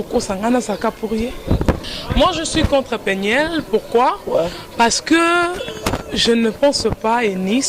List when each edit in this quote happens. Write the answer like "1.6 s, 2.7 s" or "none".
1.9 s